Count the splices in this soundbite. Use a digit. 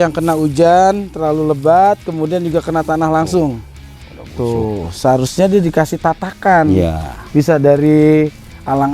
0